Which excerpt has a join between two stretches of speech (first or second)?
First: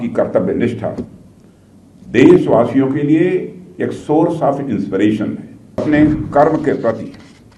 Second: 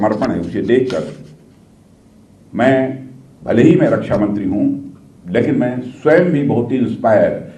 first